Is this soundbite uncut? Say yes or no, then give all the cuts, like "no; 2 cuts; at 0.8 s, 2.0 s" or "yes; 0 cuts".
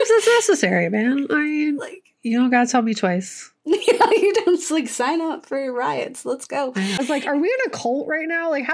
no; 1 cut; at 7.0 s